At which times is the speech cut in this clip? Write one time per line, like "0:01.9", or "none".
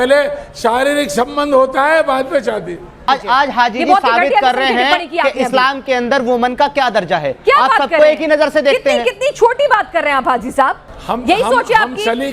0:03.1
0:10.9